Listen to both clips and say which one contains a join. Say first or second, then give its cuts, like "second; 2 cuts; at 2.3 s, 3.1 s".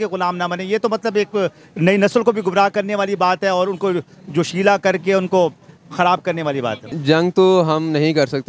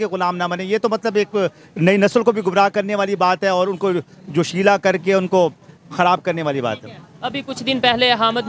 first; 1 cut; at 6.9 s